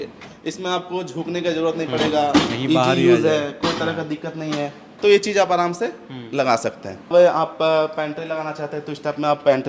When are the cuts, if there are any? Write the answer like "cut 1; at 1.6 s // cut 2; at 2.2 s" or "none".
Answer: none